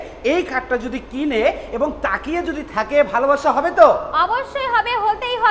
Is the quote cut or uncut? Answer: uncut